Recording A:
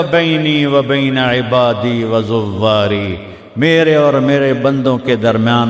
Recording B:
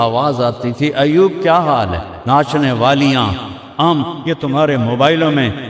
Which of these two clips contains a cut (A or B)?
B